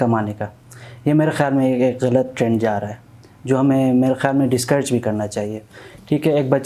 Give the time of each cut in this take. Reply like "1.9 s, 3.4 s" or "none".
none